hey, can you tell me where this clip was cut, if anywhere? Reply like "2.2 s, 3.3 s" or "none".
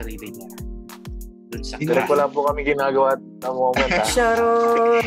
none